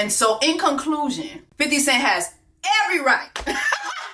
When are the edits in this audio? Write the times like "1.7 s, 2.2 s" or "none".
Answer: 1.4 s